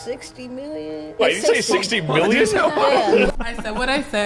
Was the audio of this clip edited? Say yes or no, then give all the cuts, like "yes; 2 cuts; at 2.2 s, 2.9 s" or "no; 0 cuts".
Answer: yes; 1 cut; at 3.3 s